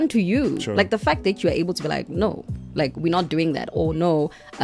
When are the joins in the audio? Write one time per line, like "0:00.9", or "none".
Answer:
none